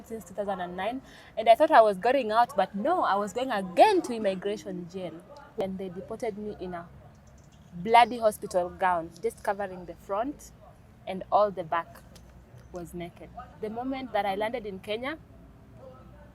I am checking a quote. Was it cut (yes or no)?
yes